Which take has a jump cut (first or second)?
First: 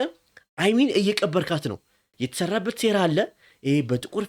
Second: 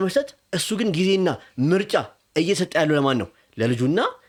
first